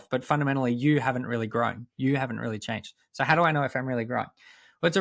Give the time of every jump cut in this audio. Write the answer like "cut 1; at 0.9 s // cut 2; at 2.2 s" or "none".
none